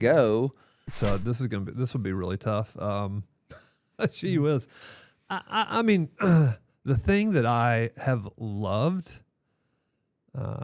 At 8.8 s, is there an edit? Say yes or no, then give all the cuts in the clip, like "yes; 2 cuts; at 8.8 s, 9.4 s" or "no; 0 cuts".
no; 1 cut; at 0.9 s